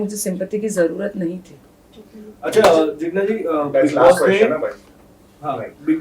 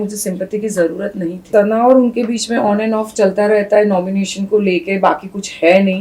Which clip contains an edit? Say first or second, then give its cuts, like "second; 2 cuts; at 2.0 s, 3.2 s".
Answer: second; 1 cut; at 1.4 s